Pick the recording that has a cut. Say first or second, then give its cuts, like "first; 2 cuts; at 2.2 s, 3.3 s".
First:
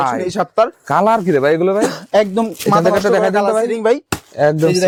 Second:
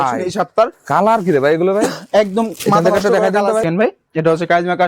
second; 1 cut; at 3.6 s